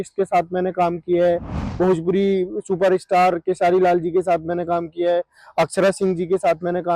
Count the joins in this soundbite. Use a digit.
1